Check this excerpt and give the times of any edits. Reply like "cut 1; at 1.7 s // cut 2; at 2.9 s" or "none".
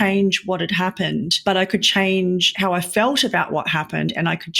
cut 1; at 1.3 s // cut 2; at 2.5 s